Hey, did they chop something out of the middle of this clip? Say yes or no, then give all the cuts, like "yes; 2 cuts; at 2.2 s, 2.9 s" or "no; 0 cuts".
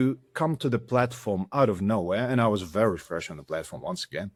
no; 0 cuts